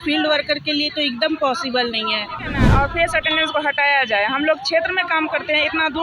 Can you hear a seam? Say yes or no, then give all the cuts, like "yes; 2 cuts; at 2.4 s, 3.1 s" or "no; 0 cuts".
yes; 1 cut; at 2.6 s